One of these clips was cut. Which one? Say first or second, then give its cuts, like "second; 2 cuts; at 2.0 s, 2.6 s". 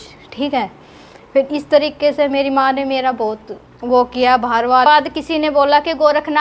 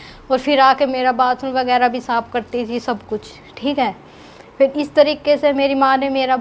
first; 1 cut; at 4.9 s